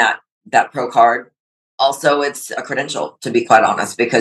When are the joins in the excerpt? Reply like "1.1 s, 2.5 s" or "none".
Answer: 2.5 s